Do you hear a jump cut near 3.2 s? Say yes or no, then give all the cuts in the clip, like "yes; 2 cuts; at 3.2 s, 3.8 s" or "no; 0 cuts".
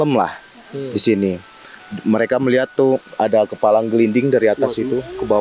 no; 0 cuts